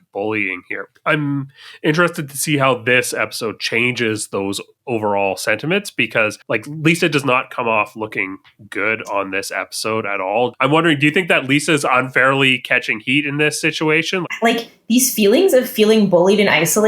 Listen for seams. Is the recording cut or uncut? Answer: cut